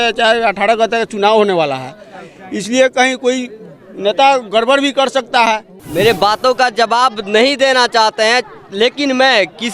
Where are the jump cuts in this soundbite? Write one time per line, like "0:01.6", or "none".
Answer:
0:05.8

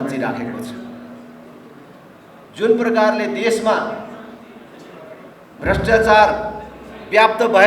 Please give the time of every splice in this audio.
none

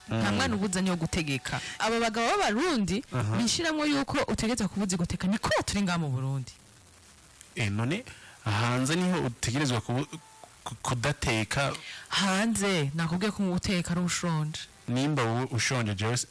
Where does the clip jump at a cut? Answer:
0:01.8
0:14.9

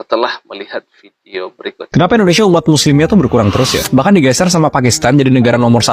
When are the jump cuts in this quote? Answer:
0:01.8

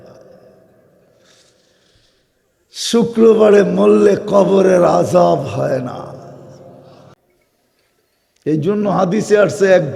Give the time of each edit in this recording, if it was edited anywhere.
0:07.3

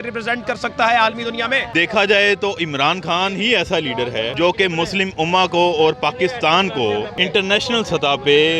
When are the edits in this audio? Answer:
0:01.7
0:04.3
0:07.2

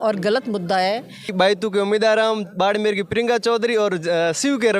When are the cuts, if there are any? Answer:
0:01.3

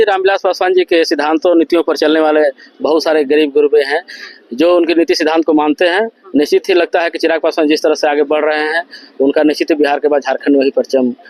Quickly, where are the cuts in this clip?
none

